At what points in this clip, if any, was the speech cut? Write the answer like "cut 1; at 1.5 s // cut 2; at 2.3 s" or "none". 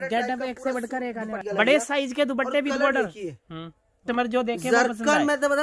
cut 1; at 1.4 s // cut 2; at 3.9 s